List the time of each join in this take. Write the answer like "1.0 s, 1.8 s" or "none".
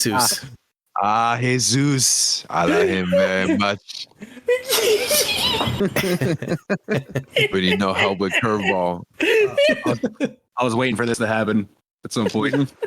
5.7 s